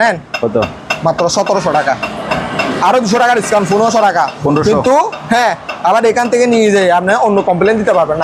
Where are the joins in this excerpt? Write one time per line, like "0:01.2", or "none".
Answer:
none